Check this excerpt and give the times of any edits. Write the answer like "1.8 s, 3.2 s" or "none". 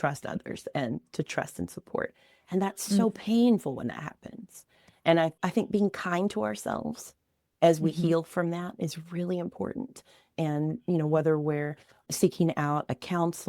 5.3 s